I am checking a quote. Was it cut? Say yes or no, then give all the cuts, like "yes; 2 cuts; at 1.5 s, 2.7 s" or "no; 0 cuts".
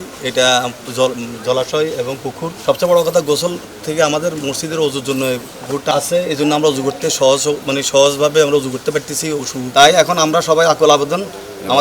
yes; 3 cuts; at 2.5 s, 5.9 s, 9.6 s